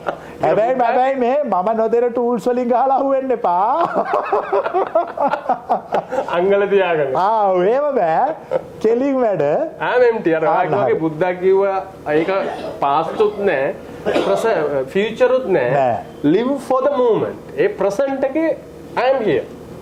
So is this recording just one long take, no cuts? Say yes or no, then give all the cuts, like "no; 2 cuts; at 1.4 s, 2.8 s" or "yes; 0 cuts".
yes; 0 cuts